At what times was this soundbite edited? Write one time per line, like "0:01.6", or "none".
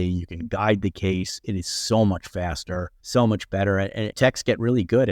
0:02.9
0:04.1

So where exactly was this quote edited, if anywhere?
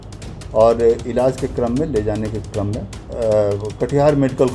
0:03.0

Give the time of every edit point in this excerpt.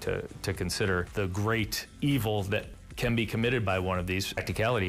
none

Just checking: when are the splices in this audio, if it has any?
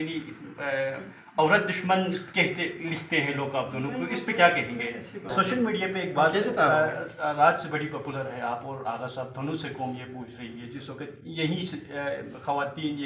0:05.3

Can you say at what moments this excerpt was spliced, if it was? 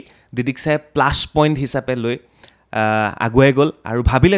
none

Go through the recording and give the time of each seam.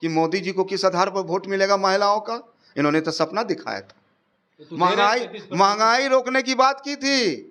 none

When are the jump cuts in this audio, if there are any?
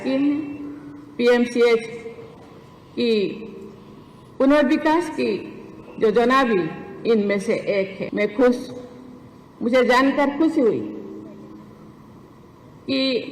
0:08.0

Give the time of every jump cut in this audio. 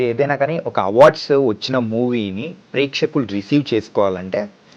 none

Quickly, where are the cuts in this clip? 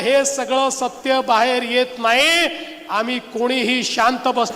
none

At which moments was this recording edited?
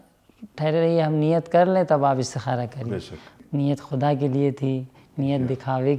0:03.3

